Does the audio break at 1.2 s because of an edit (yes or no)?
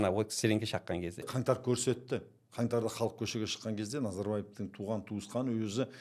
yes